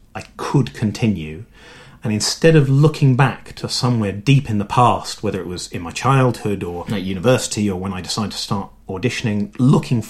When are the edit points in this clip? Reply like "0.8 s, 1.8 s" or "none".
none